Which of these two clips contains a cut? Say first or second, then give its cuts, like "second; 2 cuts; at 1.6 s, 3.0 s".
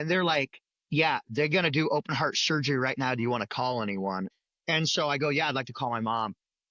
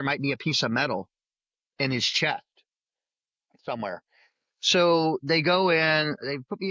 first; 1 cut; at 4.4 s